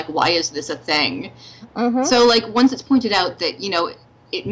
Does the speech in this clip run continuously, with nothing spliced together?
yes; 0 cuts

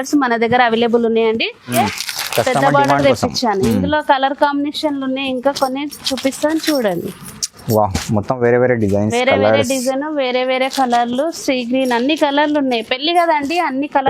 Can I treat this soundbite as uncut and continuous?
no; 1 cut; at 1.7 s

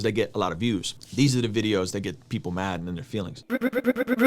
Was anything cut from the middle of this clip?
yes; 2 cuts; at 1.0 s, 3.4 s

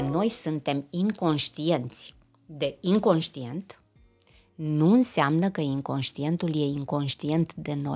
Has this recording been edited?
no; 0 cuts

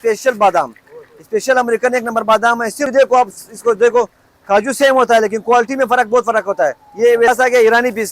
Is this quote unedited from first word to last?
no; 2 cuts; at 2.9 s, 7.3 s

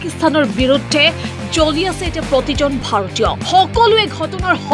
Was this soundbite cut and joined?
no; 0 cuts

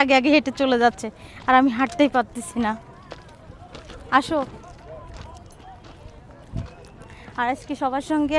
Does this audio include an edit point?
no; 0 cuts

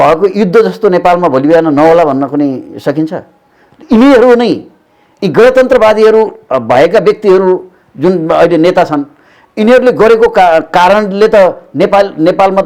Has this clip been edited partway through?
no; 0 cuts

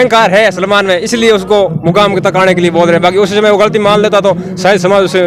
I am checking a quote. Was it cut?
no; 0 cuts

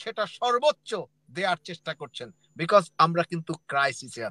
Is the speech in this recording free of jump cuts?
yes; 0 cuts

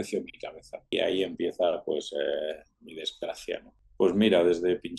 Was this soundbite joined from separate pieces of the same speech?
yes; 2 cuts; at 0.9 s, 3.8 s

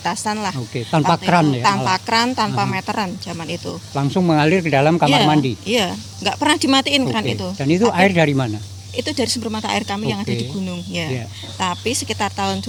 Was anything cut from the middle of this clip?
no; 0 cuts

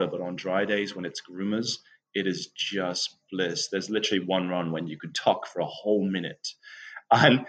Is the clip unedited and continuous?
no; 1 cut; at 5.0 s

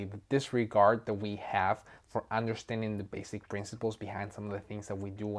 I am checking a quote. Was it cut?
no; 0 cuts

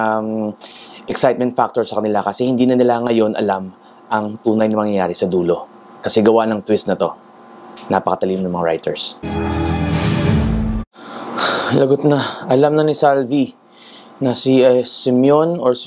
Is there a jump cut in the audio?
yes; 1 cut; at 9.2 s

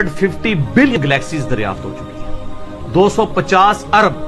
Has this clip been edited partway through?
yes; 1 cut; at 0.9 s

